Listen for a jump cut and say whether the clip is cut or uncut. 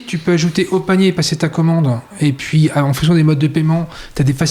uncut